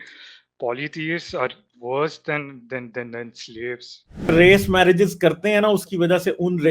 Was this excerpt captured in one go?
no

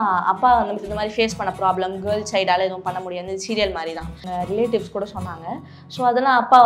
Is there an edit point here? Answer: yes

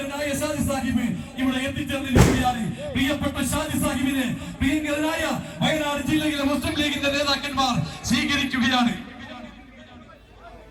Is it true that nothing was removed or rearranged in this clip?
yes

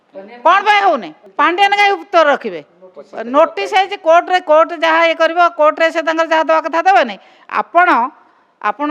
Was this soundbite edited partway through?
yes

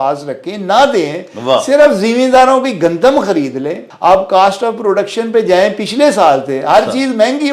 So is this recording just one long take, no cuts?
no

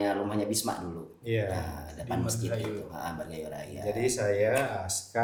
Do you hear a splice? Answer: no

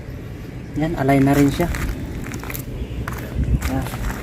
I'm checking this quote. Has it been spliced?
no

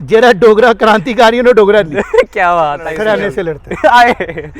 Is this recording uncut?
no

